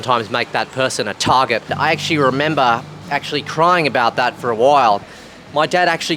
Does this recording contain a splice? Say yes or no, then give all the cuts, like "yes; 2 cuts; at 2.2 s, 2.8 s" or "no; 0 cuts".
yes; 2 cuts; at 1.7 s, 5.1 s